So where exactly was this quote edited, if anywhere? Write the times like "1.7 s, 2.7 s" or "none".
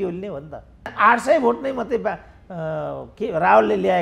0.9 s